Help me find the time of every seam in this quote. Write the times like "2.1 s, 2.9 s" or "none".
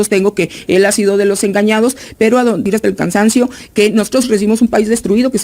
2.6 s